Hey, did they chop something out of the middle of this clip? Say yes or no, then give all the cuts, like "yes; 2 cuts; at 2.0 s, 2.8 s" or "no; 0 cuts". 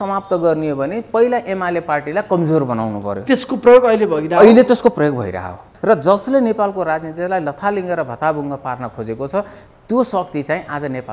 yes; 1 cut; at 5.7 s